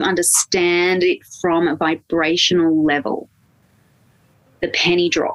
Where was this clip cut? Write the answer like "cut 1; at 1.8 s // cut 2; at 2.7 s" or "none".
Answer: none